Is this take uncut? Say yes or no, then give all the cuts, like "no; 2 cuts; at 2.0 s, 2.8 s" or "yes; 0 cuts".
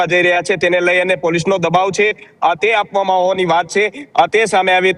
yes; 0 cuts